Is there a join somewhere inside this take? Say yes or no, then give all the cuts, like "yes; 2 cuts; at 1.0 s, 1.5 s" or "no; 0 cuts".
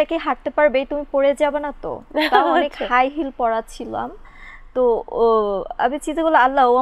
no; 0 cuts